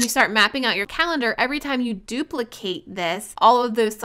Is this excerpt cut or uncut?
uncut